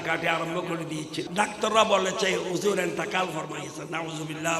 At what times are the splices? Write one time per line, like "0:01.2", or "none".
0:01.3